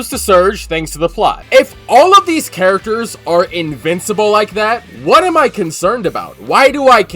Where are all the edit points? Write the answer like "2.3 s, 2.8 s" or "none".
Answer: 1.4 s